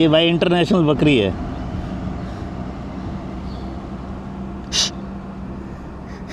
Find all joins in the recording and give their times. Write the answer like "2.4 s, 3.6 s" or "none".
none